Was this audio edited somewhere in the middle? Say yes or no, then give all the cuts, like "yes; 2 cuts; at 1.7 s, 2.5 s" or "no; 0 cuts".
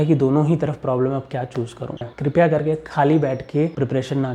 yes; 1 cut; at 2.0 s